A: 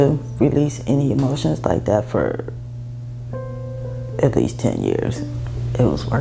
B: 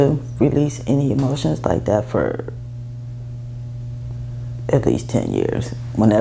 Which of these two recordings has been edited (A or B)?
A